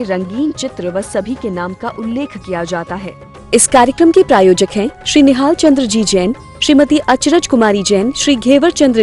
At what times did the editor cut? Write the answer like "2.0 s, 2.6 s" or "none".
3.1 s